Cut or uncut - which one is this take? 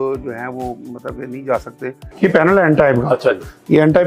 cut